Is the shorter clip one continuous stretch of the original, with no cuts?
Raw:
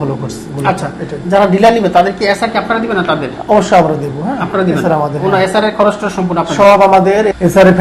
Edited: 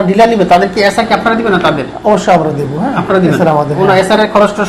yes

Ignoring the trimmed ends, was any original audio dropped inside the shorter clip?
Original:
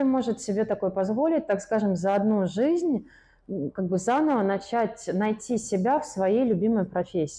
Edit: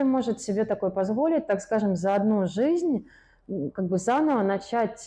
no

